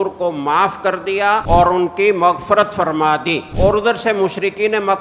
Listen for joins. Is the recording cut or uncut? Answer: cut